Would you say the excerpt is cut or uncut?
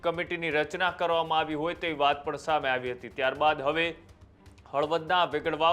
uncut